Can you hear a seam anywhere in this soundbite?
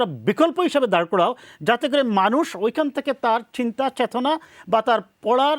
no; 0 cuts

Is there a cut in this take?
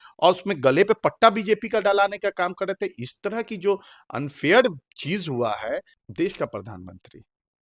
yes; 1 cut; at 6.0 s

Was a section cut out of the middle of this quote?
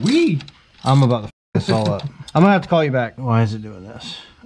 yes; 2 cuts; at 2.1 s, 3.2 s

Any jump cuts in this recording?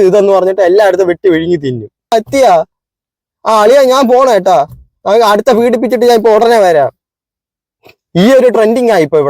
yes; 1 cut; at 2.1 s

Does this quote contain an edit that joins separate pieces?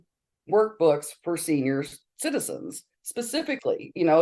no; 0 cuts

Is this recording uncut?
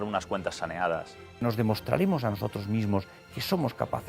no; 1 cut; at 1.4 s

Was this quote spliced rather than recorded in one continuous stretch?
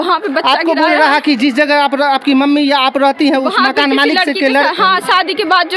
no; 0 cuts

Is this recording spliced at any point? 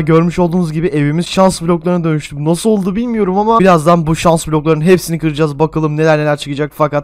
no; 0 cuts

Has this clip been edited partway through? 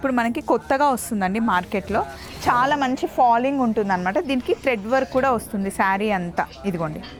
no; 0 cuts

